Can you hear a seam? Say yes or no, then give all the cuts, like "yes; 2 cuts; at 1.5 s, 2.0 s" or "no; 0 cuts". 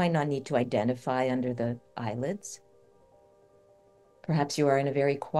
no; 0 cuts